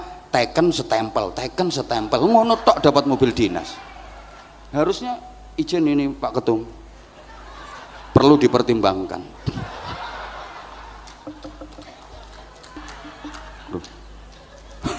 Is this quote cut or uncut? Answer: cut